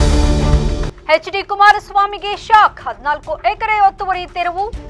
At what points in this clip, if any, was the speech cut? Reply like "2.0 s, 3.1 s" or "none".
0.9 s